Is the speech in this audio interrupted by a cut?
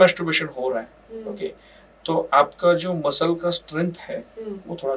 no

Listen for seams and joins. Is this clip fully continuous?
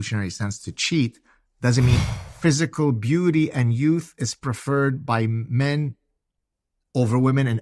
no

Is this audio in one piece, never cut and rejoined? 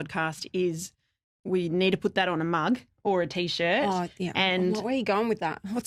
yes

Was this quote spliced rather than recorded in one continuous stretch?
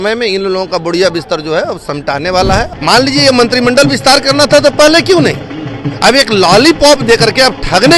yes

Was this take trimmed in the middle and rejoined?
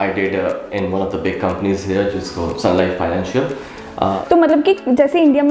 yes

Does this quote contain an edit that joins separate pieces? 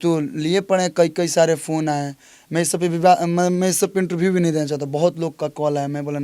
no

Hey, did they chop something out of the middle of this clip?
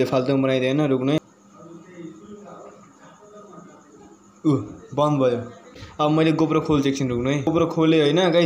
yes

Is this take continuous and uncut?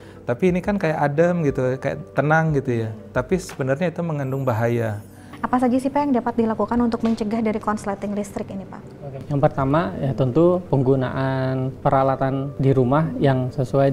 no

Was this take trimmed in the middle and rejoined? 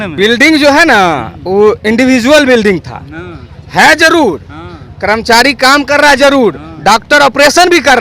no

